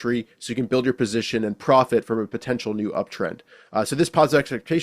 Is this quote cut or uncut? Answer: uncut